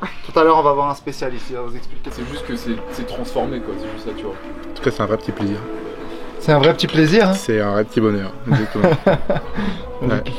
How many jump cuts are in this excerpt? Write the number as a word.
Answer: one